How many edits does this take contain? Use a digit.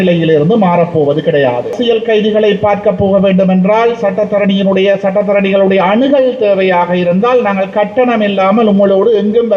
1